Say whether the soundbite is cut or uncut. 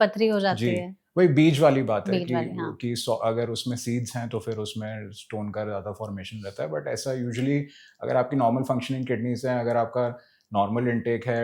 uncut